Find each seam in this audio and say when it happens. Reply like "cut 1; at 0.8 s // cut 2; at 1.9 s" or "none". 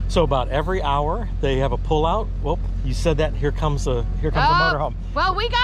none